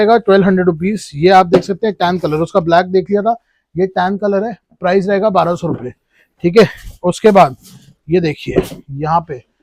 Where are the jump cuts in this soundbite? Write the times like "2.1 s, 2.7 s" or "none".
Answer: none